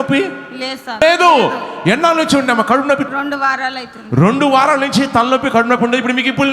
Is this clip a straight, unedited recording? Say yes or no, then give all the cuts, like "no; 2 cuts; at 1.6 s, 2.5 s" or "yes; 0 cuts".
no; 2 cuts; at 1.0 s, 3.1 s